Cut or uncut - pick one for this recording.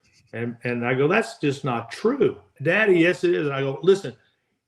cut